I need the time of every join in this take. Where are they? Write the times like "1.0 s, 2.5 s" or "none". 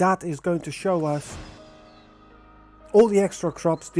1.6 s